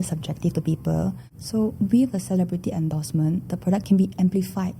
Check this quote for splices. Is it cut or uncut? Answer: cut